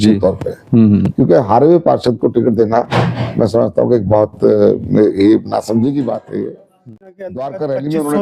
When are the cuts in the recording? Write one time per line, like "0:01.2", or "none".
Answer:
0:06.9